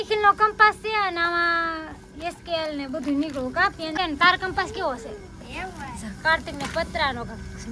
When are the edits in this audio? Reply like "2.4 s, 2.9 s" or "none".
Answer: 3.9 s